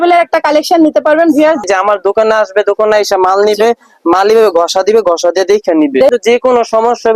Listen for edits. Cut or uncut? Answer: cut